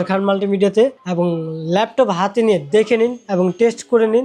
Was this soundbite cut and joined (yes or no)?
no